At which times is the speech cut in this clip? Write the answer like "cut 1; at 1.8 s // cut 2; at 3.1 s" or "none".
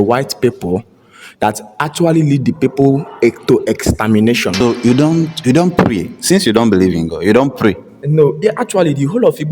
cut 1; at 4.5 s